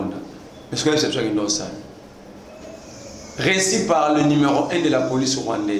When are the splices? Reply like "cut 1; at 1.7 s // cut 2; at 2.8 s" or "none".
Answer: none

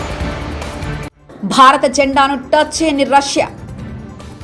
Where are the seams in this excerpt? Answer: cut 1; at 1.1 s

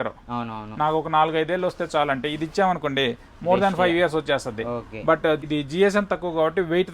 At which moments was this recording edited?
cut 1; at 5.4 s

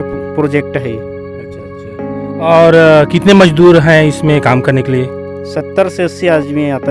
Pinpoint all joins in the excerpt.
none

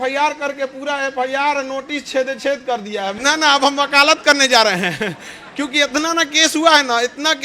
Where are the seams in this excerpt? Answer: cut 1; at 3.1 s

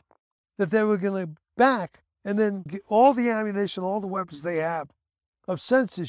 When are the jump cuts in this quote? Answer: cut 1; at 2.5 s

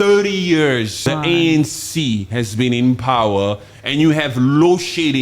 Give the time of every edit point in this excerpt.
cut 1; at 1.0 s

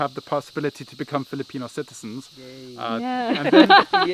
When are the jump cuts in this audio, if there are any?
none

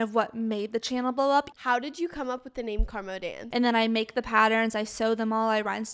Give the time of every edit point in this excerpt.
cut 1; at 1.5 s // cut 2; at 3.4 s

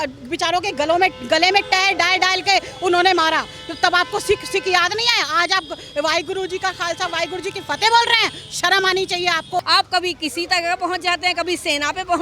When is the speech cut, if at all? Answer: cut 1; at 9.6 s

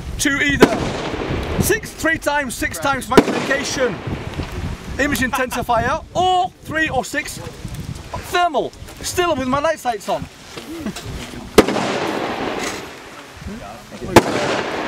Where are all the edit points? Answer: cut 1; at 2.2 s

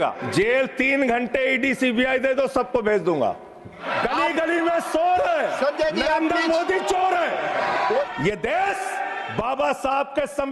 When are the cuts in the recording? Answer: none

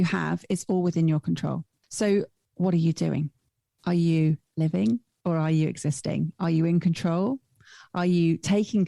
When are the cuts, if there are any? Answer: cut 1; at 1.8 s // cut 2; at 2.4 s

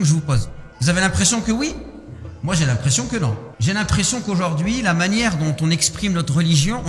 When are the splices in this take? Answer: cut 1; at 3.5 s

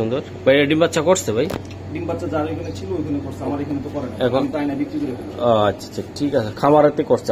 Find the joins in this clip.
none

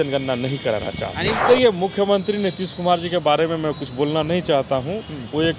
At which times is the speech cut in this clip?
cut 1; at 1.4 s

